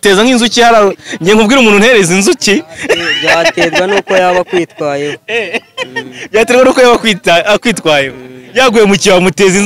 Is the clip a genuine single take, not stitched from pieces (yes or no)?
yes